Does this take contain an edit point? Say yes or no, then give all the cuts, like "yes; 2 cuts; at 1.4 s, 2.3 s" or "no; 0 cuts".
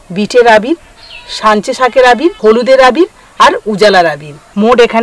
no; 0 cuts